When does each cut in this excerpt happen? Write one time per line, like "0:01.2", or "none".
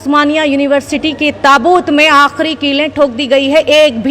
none